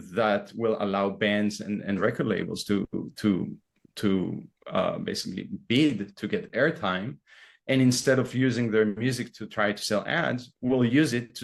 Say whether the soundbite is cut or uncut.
uncut